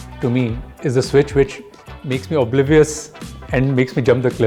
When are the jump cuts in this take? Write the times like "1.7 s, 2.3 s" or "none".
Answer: none